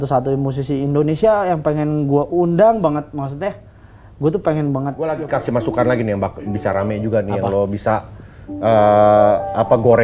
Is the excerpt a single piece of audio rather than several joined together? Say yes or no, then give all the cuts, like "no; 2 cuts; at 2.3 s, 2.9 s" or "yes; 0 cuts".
no; 1 cut; at 5.1 s